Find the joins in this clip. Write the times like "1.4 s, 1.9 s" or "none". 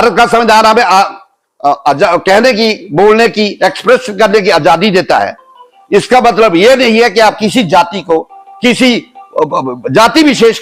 none